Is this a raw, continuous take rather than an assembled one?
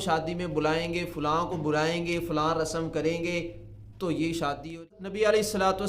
no; 1 cut; at 4.9 s

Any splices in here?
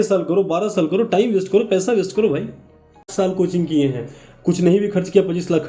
yes; 1 cut; at 3.1 s

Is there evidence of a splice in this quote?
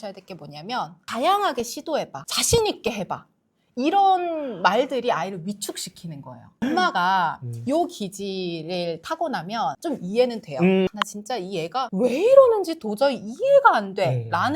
yes; 2 cuts; at 1.0 s, 10.9 s

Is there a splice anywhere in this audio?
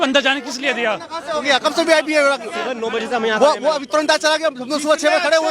no; 0 cuts

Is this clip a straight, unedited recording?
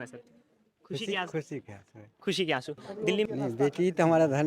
no; 1 cut; at 3.3 s

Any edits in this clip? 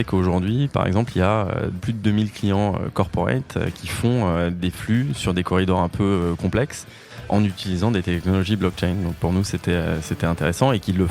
yes; 1 cut; at 1.8 s

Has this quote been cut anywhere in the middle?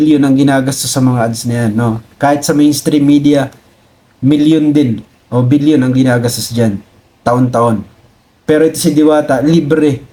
no; 0 cuts

